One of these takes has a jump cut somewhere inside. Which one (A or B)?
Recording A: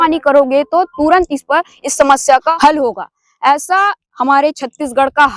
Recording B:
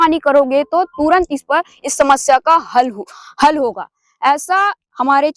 A